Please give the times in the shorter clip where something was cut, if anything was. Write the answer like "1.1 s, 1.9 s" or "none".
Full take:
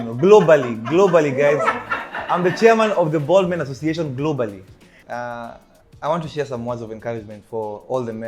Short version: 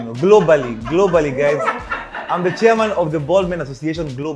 none